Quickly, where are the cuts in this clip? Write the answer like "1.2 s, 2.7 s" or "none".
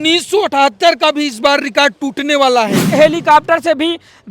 2.9 s